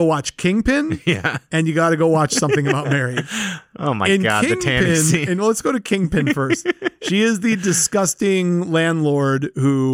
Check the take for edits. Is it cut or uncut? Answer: uncut